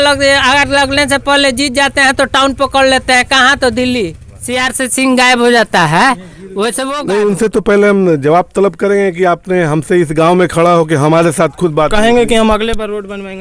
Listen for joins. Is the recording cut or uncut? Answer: cut